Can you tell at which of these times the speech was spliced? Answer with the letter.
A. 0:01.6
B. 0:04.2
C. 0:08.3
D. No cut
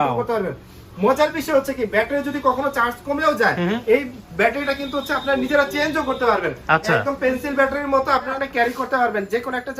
C